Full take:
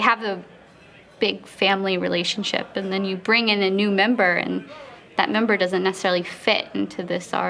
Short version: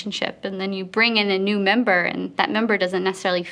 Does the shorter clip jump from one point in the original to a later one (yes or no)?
yes